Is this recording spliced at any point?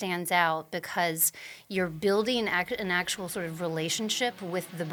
no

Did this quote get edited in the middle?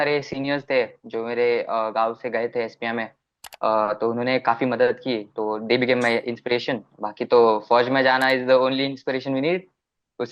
no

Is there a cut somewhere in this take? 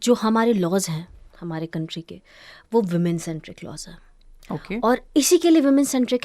no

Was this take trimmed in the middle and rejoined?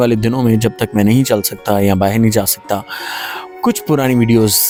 no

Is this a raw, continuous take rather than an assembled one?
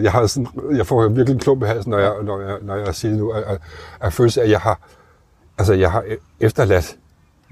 yes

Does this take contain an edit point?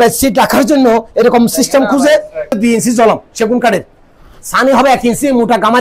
yes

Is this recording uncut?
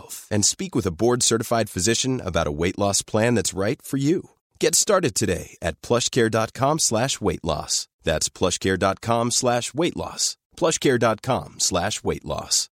yes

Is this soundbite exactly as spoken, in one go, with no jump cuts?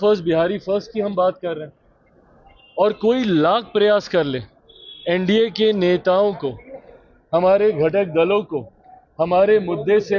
yes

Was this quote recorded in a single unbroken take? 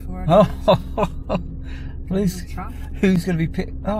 yes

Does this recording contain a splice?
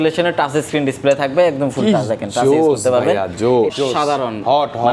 yes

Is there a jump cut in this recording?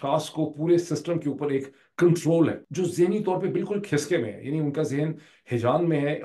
no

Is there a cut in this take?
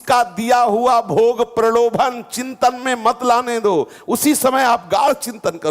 no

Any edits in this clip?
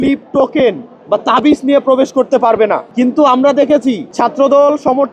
yes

